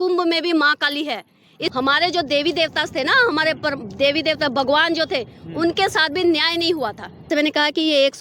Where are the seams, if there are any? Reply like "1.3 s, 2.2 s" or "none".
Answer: 1.7 s, 7.4 s